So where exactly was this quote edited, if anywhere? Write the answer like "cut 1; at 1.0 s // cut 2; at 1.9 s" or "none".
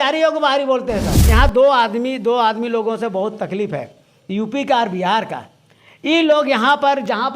cut 1; at 1.2 s